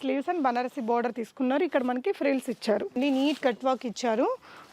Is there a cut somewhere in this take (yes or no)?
yes